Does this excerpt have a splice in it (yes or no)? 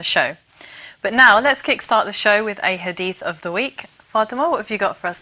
yes